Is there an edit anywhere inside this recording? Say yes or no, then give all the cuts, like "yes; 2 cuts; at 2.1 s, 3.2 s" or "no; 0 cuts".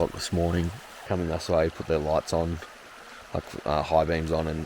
yes; 1 cut; at 1.0 s